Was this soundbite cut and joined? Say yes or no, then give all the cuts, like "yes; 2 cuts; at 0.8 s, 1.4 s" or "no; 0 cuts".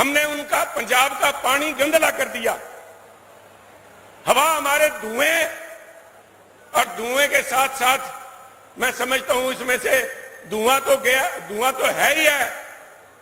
no; 0 cuts